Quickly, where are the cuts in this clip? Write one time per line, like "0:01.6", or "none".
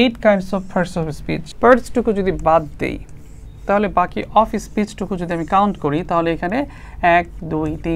0:01.4